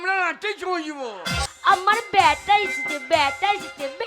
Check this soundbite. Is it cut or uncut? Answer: cut